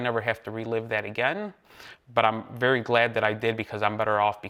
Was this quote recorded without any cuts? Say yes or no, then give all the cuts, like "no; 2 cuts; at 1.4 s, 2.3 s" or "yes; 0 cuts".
yes; 0 cuts